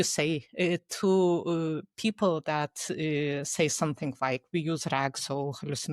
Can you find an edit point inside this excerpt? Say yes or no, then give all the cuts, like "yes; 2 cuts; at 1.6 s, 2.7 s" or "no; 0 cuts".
no; 0 cuts